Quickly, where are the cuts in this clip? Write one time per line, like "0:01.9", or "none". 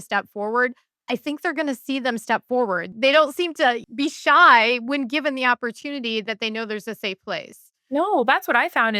0:02.9
0:03.8